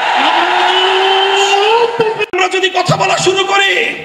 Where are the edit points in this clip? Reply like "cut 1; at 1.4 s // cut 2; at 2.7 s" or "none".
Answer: cut 1; at 2.2 s